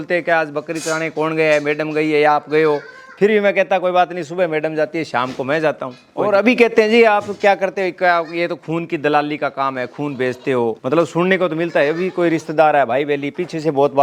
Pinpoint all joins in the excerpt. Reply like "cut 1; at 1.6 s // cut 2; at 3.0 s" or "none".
cut 1; at 6.1 s // cut 2; at 10.8 s